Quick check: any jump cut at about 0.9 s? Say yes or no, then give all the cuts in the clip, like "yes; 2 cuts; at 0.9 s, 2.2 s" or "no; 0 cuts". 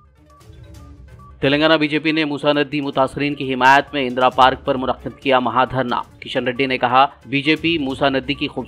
yes; 1 cut; at 0.9 s